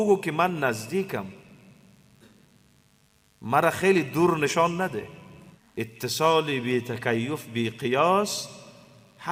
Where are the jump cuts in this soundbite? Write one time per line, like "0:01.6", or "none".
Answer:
none